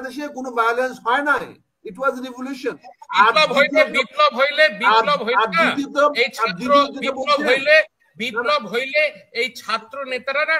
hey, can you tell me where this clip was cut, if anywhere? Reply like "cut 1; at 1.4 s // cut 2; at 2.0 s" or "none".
cut 1; at 2.9 s